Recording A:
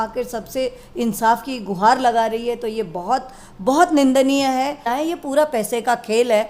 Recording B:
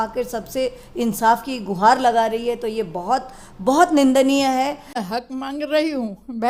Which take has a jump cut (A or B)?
A